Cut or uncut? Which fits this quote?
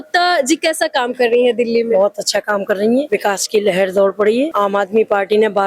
uncut